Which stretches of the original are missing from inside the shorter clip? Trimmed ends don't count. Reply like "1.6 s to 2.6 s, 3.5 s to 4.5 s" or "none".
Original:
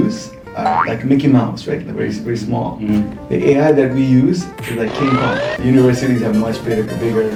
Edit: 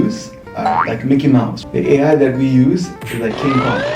1.6 s to 3.2 s